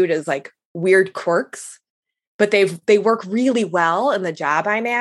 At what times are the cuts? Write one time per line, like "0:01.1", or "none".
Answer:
none